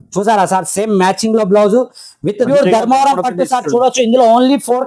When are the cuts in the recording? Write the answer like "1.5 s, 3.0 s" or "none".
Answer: 2.5 s